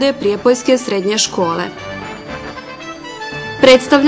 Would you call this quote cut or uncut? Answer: cut